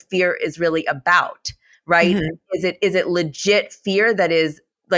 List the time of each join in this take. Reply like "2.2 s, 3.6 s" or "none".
none